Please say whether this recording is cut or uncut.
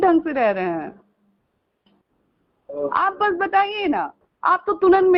uncut